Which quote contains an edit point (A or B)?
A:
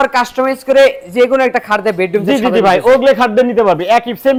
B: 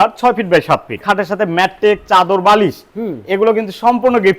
B